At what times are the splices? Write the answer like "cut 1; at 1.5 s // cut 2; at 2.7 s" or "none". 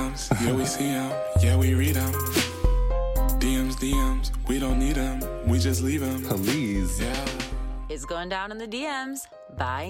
none